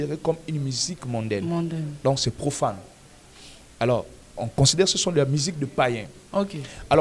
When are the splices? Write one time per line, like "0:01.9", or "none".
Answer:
none